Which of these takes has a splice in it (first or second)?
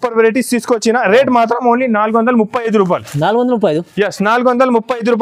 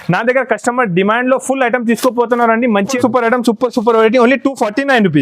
second